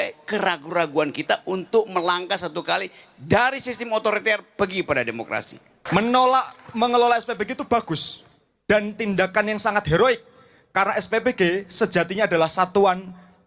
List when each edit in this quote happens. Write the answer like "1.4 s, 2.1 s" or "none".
5.8 s